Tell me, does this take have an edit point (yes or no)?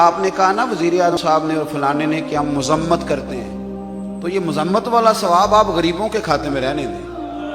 yes